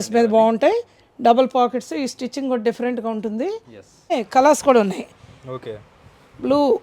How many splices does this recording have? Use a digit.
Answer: 1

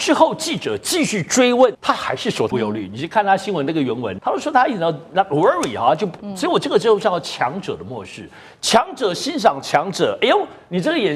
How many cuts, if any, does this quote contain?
3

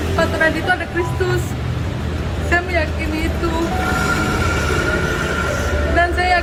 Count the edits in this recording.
0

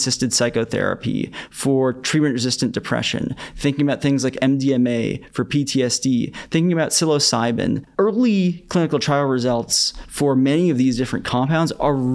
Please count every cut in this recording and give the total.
1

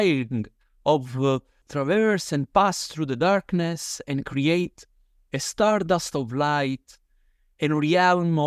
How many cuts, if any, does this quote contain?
1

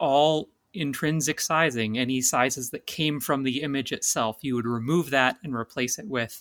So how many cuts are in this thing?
0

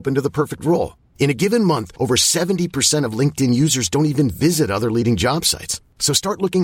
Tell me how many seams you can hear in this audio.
0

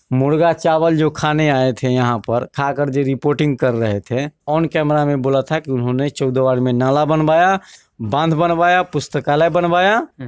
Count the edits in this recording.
1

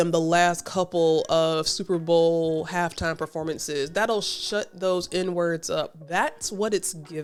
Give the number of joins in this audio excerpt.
0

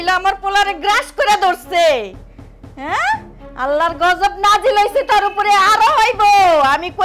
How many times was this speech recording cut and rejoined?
0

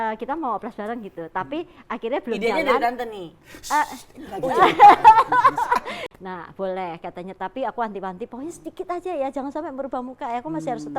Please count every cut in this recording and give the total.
1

